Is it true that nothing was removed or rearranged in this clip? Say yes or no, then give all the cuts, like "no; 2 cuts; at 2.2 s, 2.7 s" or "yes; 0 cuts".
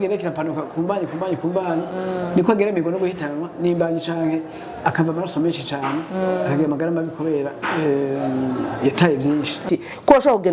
no; 1 cut; at 9.6 s